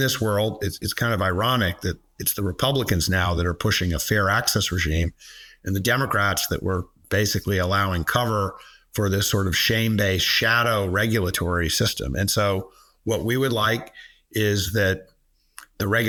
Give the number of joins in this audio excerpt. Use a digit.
0